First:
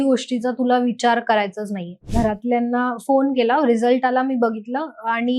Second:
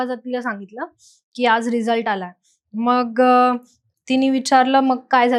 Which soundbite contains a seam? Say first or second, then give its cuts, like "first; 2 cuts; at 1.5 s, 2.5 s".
first; 1 cut; at 2.1 s